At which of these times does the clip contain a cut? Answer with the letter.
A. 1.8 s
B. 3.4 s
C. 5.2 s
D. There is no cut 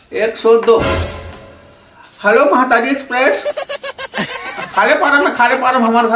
C